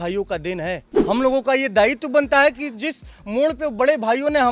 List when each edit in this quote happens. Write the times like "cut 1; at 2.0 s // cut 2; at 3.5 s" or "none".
cut 1; at 0.9 s